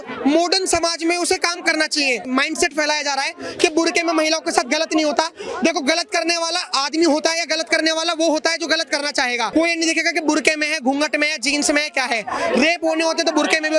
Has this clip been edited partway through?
yes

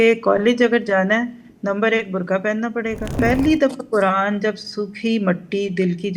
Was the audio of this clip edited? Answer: yes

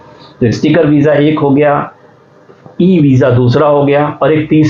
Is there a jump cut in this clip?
no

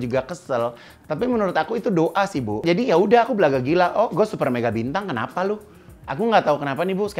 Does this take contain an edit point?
yes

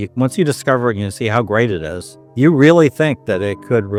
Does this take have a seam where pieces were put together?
no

